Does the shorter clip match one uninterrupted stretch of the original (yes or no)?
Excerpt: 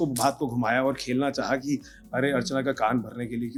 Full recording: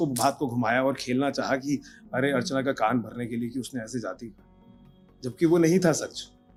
yes